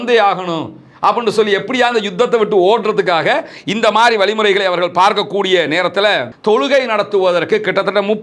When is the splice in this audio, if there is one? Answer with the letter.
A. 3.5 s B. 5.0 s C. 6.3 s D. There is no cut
C